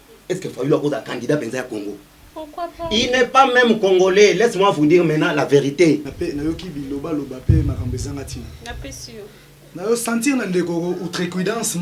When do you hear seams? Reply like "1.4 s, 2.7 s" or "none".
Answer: 6.1 s